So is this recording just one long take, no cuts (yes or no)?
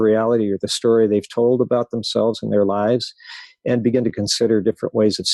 yes